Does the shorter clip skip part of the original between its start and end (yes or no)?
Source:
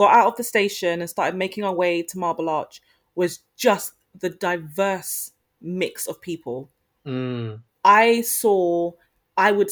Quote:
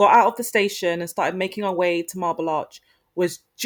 no